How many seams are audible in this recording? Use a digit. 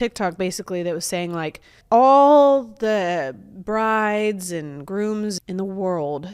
2